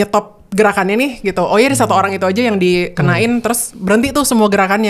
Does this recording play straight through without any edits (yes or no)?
yes